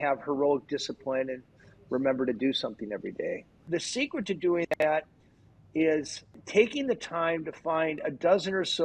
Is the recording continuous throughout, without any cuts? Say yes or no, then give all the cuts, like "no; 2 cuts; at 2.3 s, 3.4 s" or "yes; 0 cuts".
no; 2 cuts; at 3.6 s, 6.4 s